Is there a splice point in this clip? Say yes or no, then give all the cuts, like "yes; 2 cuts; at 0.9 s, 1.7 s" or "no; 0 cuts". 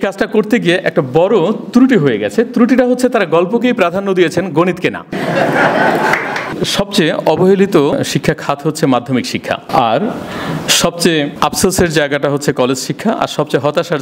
yes; 5 cuts; at 5.1 s, 6.5 s, 7.9 s, 9.6 s, 11.3 s